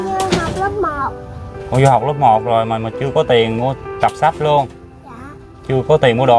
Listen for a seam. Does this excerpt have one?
no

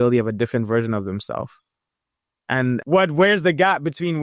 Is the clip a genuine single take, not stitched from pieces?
yes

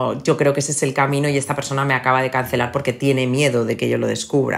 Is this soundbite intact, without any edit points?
yes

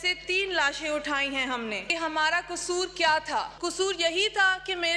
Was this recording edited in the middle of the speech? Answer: yes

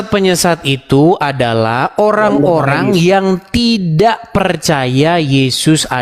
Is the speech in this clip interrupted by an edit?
no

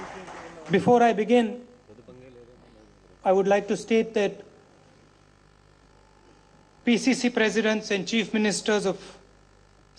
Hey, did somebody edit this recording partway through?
no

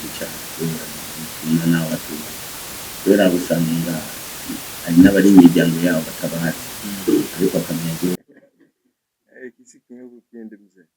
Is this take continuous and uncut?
no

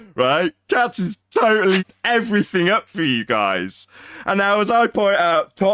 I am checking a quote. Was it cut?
yes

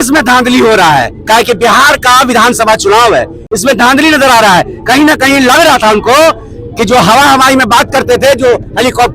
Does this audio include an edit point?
no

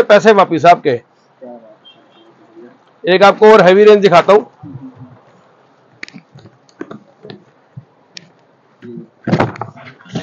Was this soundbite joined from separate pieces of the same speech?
no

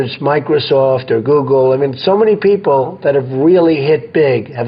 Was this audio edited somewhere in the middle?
no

